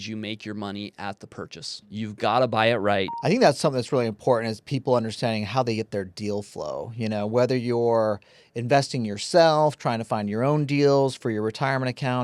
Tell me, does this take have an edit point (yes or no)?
yes